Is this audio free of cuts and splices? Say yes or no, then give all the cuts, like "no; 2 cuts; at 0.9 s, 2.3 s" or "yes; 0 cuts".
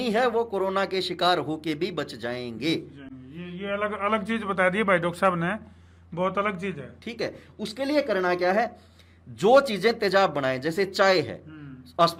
yes; 0 cuts